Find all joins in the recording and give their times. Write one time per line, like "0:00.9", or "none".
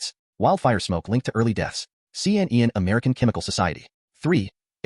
0:03.9